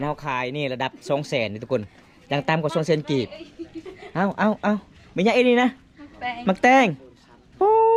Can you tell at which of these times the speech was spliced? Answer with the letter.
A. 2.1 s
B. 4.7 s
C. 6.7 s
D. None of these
D